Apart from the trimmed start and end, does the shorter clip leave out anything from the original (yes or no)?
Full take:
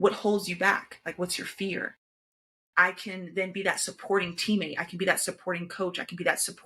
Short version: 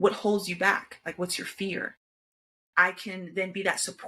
no